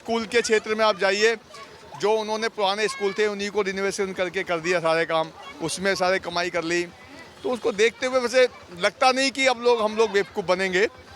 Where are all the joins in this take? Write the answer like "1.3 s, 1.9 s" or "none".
none